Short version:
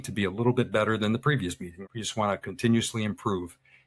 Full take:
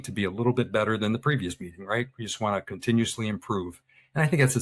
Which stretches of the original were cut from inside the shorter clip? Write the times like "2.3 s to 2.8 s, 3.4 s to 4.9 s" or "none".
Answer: 1.8 s to 2.1 s